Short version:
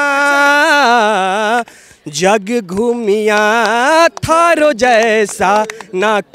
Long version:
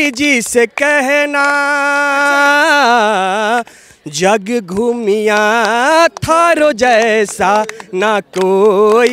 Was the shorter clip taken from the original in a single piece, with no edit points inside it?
yes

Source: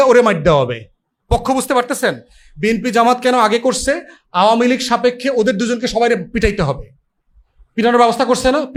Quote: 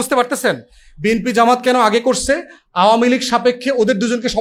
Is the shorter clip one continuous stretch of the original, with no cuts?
yes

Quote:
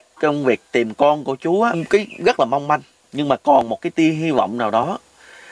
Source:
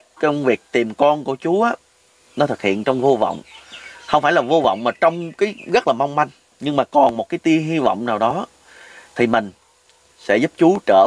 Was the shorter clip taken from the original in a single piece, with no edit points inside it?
no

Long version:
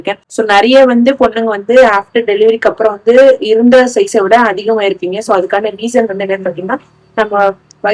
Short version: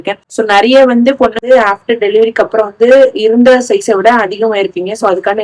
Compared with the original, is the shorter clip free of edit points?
no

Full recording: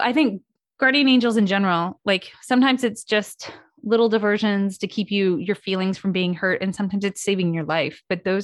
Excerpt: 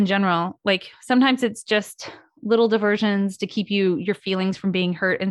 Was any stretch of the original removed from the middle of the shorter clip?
no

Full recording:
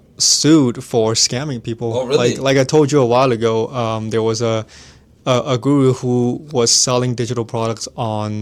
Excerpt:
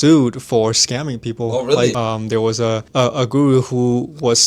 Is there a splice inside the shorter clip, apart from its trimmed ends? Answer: yes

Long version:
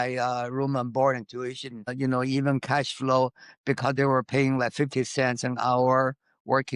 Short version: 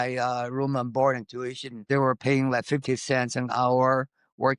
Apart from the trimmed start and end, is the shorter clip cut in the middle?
yes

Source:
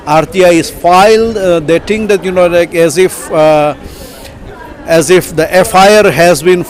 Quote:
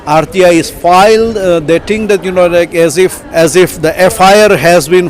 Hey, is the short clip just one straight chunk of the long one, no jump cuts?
no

